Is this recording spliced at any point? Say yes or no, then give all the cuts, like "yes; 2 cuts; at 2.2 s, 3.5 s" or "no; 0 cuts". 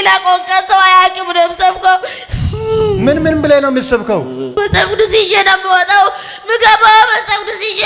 no; 0 cuts